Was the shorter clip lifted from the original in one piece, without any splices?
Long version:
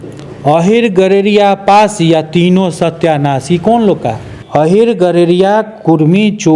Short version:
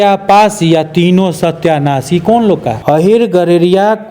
no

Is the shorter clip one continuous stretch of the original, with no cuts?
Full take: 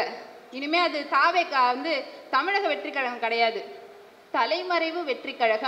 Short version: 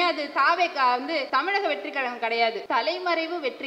no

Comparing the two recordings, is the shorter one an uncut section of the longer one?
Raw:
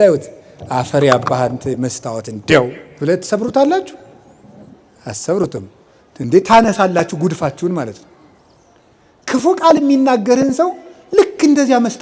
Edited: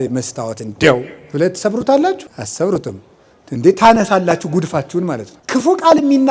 no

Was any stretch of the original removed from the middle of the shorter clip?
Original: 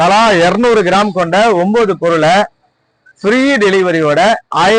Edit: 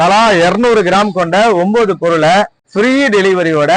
yes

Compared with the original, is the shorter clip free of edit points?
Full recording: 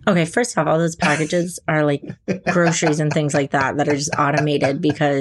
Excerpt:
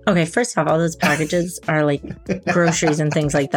yes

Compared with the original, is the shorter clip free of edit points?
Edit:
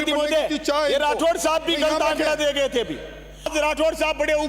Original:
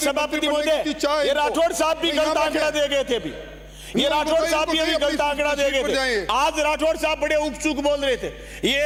no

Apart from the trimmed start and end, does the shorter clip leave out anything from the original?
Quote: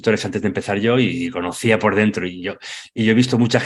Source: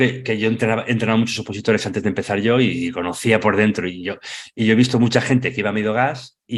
no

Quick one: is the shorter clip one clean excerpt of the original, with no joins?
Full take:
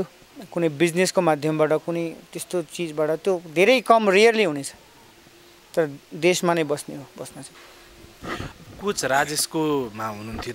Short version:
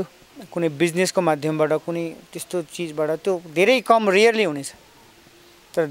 yes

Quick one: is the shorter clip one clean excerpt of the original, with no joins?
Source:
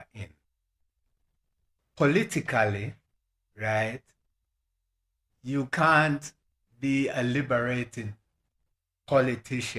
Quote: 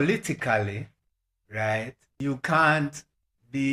no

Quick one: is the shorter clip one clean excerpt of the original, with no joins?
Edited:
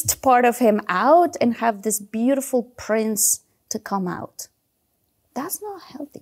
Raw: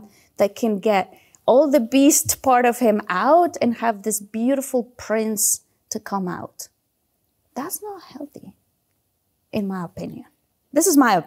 yes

